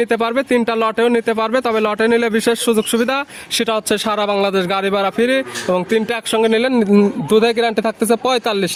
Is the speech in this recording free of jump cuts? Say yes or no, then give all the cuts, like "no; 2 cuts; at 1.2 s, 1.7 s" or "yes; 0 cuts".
yes; 0 cuts